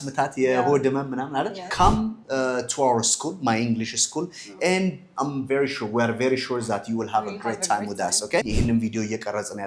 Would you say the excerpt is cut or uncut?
cut